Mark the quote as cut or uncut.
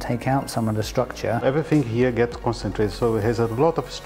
cut